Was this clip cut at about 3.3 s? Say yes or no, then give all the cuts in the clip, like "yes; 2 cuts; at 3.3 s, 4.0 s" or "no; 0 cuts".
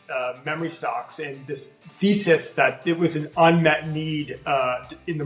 no; 1 cut; at 1.8 s